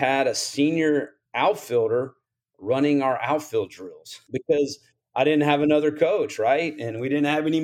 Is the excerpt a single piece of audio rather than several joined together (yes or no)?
no